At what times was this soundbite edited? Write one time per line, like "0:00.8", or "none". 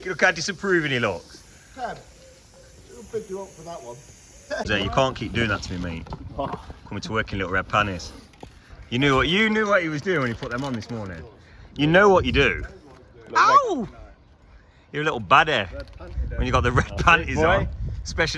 0:04.6